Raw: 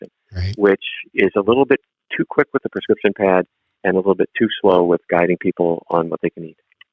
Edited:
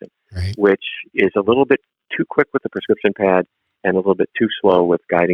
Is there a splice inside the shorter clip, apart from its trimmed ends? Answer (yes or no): no